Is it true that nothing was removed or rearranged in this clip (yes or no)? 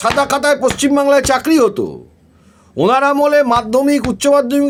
yes